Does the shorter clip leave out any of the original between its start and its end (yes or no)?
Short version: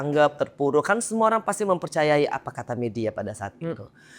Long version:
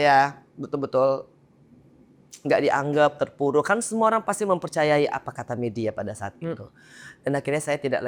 no